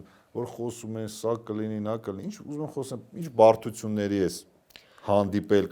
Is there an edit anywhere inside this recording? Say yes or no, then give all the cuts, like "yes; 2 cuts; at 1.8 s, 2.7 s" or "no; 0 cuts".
no; 0 cuts